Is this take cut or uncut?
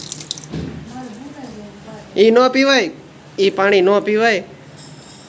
uncut